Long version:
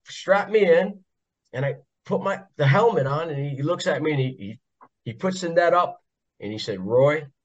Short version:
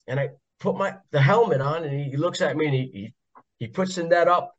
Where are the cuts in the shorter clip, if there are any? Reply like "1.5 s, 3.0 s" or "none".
none